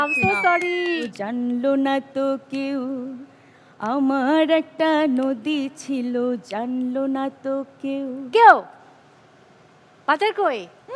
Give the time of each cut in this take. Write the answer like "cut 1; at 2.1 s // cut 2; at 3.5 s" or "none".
cut 1; at 1.1 s